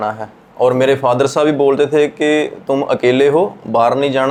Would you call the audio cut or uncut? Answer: uncut